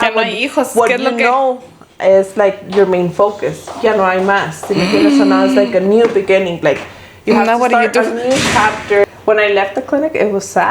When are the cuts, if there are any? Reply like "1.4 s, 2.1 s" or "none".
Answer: 9.0 s